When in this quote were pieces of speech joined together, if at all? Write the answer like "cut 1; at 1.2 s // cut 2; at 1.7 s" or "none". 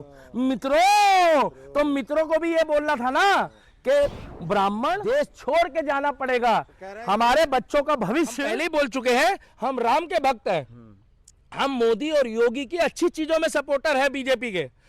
cut 1; at 5.0 s // cut 2; at 8.5 s